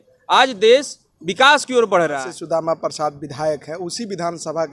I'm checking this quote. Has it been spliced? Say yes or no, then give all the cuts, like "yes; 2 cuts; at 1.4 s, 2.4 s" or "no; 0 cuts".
yes; 1 cut; at 2.3 s